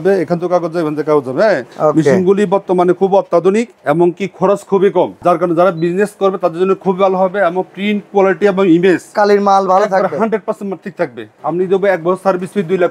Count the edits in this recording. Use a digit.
4